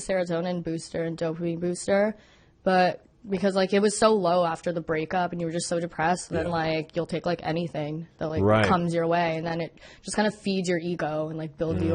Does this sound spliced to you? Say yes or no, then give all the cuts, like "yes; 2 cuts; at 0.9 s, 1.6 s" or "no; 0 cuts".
no; 0 cuts